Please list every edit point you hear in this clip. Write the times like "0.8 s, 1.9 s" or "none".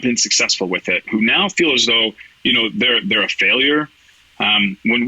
none